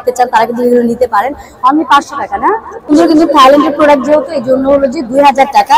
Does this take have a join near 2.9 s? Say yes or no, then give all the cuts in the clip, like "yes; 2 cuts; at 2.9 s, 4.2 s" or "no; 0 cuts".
yes; 1 cut; at 2.9 s